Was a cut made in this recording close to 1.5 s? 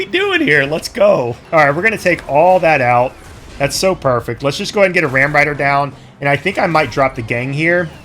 no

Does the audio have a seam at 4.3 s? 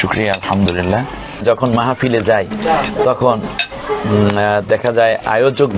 no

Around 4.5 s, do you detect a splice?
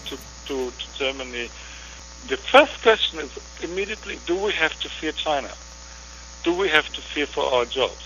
no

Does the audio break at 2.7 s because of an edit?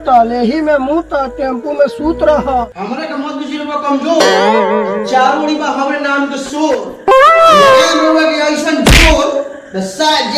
yes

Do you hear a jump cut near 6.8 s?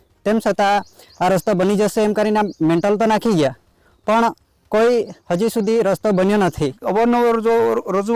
yes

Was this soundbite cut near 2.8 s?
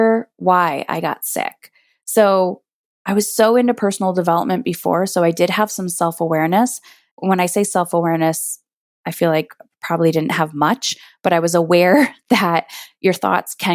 no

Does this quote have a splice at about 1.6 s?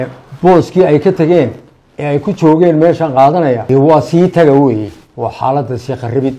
no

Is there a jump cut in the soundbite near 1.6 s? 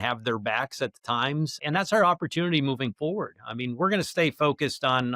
yes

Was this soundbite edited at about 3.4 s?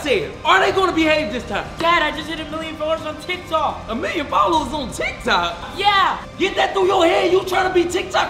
no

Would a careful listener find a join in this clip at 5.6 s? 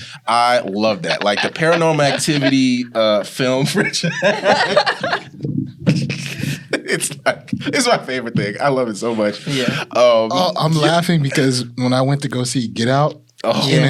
no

